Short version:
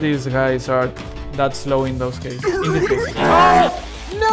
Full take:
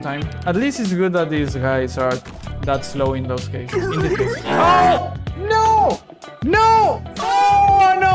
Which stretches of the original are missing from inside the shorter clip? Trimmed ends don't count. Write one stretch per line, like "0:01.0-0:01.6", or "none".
none